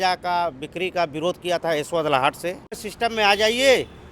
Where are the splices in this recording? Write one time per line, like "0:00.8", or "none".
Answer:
0:02.9

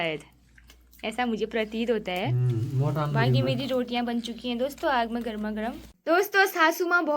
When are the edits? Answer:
0:05.9

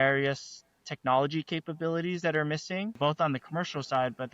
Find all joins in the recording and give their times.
0:02.9

